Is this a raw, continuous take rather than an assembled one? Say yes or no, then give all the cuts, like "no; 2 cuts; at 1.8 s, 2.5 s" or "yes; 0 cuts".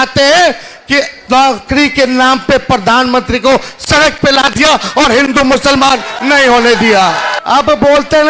no; 1 cut; at 7.3 s